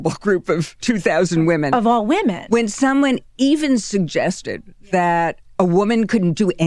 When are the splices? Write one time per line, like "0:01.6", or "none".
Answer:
none